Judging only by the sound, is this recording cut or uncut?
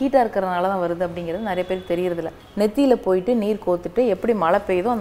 cut